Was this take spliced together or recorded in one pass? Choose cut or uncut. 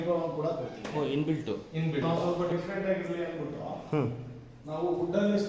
cut